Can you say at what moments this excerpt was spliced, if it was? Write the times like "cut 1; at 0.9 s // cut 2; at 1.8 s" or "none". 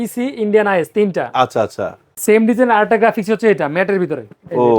cut 1; at 2.2 s